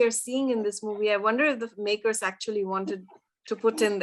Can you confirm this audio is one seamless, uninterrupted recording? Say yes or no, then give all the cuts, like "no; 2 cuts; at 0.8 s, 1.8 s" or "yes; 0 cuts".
yes; 0 cuts